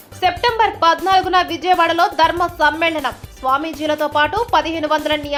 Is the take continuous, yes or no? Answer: yes